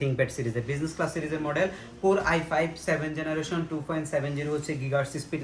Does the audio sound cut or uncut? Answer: uncut